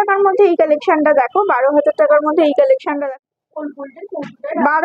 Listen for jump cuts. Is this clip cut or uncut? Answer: cut